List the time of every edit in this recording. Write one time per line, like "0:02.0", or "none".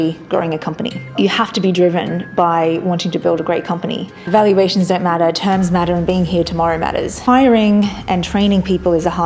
0:01.1
0:04.2
0:07.2